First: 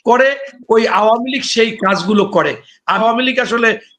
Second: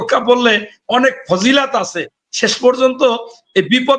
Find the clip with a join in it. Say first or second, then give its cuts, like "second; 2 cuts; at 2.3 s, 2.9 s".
first; 1 cut; at 3.0 s